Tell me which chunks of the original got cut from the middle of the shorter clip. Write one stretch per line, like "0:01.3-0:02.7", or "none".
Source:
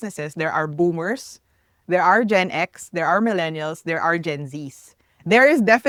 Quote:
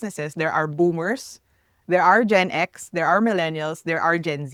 none

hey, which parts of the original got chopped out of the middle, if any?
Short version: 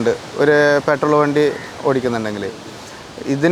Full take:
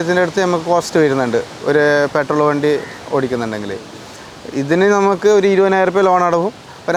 none

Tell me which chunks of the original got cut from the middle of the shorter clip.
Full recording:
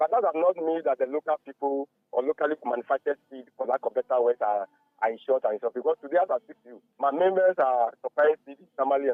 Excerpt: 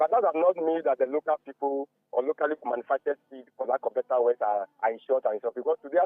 0:04.7-0:04.9

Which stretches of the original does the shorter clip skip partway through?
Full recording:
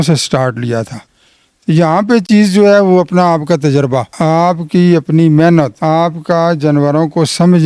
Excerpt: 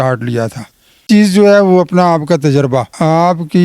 0:01.4-0:02.2

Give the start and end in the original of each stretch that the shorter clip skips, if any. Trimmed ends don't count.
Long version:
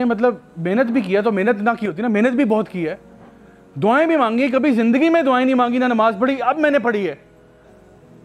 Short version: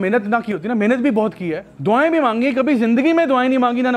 0:03.0-0:03.6

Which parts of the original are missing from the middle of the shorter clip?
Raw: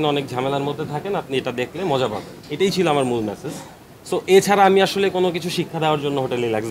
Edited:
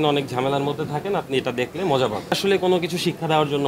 0:02.4-0:04.9

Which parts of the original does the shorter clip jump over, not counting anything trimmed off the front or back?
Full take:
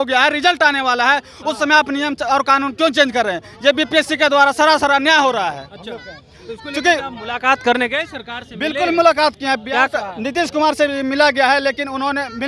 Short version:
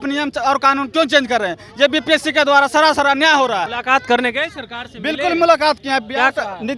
0:05.6-0:07.3

